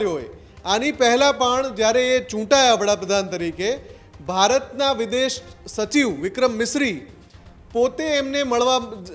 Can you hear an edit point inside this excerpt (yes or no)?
no